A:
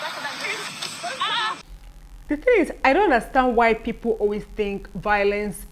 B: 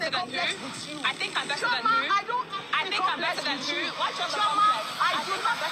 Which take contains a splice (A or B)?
A